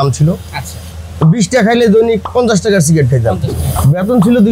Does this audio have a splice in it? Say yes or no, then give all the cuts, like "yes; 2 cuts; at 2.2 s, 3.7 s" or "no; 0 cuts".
yes; 2 cuts; at 2.3 s, 3.5 s